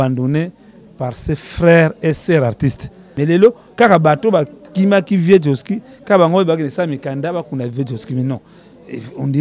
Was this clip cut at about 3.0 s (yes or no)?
yes